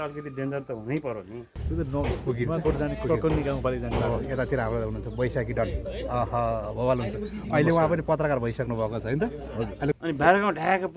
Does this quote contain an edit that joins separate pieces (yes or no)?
yes